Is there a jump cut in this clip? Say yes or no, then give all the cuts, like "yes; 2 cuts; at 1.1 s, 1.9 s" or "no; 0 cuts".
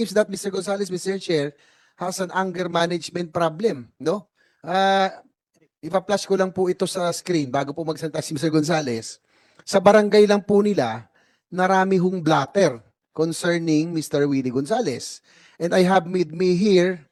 no; 0 cuts